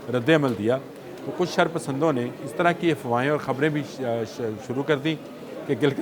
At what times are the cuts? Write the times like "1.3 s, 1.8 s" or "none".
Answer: none